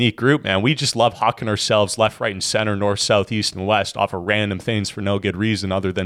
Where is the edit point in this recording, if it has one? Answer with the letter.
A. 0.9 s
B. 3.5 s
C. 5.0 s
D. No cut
D